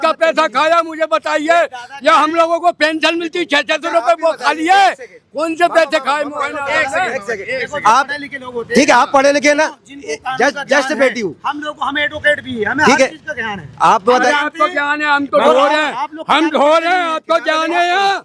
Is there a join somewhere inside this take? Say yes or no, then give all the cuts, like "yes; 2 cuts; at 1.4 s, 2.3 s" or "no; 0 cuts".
no; 0 cuts